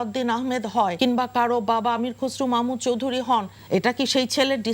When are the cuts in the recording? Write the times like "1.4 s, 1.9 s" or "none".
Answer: 0.9 s, 3.5 s